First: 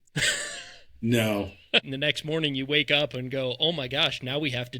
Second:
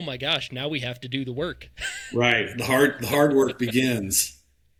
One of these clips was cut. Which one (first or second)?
first